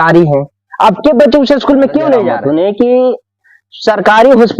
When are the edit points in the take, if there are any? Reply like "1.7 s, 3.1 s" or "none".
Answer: 2.3 s